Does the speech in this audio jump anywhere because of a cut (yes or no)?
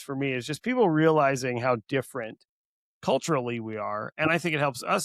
no